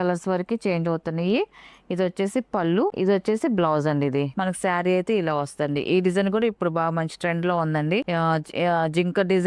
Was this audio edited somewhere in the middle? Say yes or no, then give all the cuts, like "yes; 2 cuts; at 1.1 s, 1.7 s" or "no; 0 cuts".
yes; 3 cuts; at 2.9 s, 4.3 s, 8.1 s